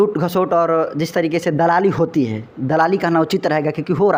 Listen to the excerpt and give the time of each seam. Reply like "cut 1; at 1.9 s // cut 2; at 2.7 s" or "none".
none

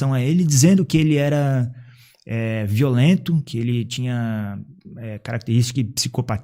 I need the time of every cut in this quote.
none

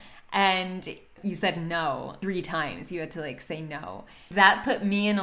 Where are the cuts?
cut 1; at 1.2 s // cut 2; at 2.1 s // cut 3; at 4.2 s

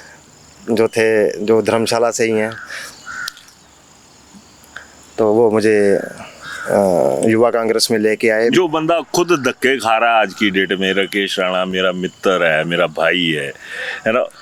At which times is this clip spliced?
none

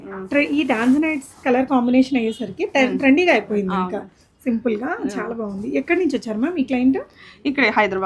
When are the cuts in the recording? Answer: none

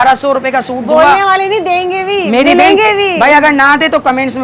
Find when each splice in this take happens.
none

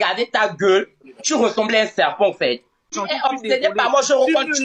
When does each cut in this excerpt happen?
cut 1; at 2.9 s

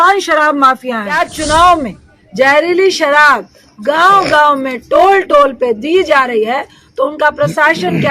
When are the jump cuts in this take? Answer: cut 1; at 1.2 s

